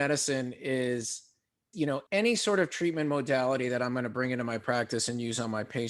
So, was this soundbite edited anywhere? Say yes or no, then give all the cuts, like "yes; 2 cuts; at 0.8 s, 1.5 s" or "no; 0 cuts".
yes; 1 cut; at 2.0 s